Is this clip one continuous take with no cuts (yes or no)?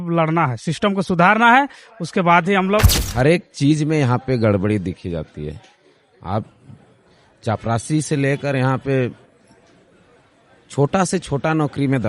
no